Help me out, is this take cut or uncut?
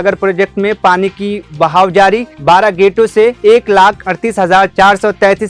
uncut